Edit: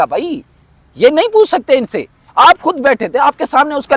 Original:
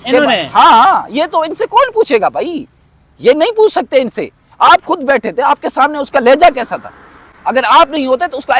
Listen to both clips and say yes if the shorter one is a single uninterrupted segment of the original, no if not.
yes